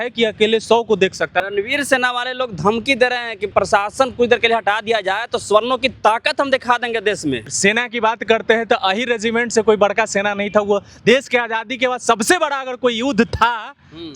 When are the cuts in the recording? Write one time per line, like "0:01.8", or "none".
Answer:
0:01.4
0:03.5
0:07.5